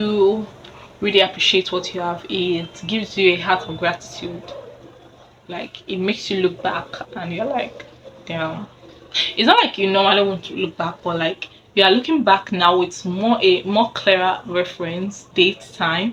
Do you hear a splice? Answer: no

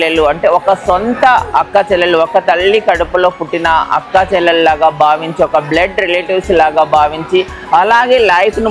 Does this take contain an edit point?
no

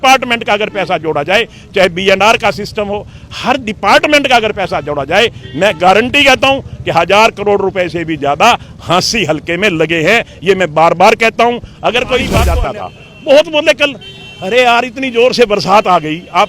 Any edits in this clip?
yes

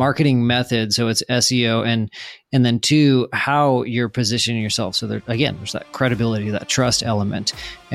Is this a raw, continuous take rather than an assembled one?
yes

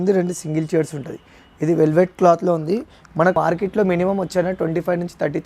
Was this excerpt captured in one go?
no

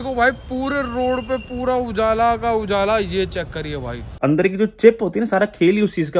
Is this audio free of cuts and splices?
no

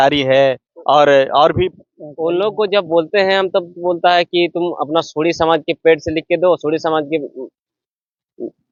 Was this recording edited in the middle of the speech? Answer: no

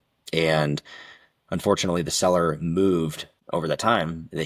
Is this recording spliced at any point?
yes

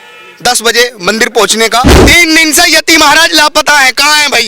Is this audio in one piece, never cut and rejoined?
no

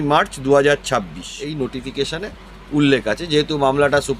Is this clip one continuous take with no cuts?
no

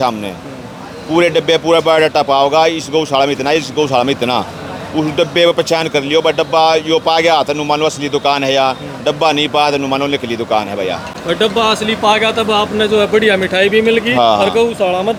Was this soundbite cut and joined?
no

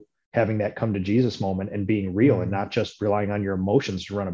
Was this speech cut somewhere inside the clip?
no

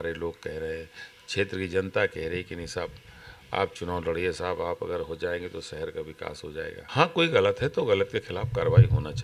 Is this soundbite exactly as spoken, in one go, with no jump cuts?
no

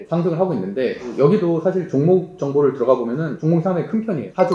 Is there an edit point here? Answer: no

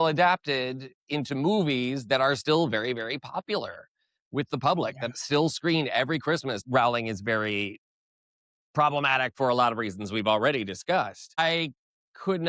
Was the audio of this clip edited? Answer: yes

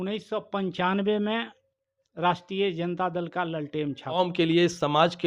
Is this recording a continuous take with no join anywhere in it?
no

